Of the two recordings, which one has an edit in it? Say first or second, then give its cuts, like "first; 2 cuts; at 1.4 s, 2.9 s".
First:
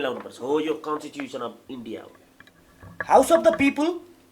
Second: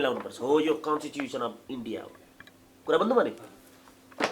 first; 1 cut; at 2.7 s